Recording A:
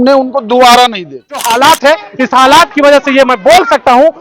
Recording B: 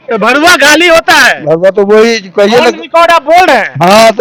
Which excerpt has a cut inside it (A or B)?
A